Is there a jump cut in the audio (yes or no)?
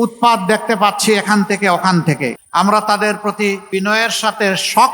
yes